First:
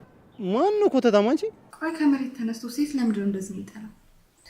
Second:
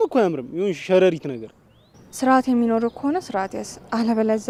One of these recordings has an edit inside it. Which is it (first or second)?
first